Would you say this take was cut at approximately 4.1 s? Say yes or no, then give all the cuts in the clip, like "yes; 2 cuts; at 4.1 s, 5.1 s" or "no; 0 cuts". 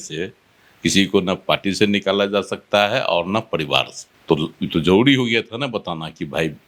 no; 0 cuts